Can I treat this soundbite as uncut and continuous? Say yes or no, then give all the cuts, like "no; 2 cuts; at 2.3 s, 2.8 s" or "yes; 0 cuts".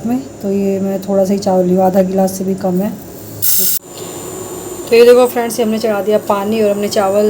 no; 1 cut; at 3.7 s